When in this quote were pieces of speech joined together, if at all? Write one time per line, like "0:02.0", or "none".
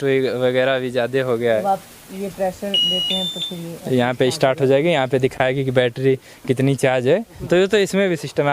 0:01.6
0:07.3